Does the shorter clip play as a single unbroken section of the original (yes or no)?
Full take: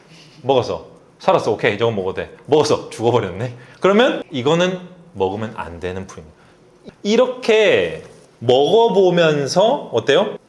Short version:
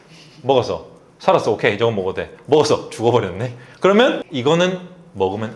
yes